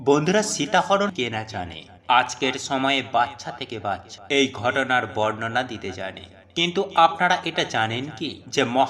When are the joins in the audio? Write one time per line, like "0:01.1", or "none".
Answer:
0:01.1